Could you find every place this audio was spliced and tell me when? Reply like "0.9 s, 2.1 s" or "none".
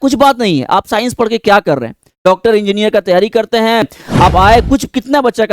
3.9 s